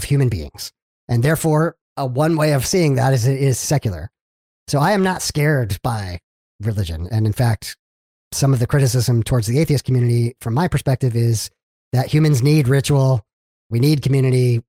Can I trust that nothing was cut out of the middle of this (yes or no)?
no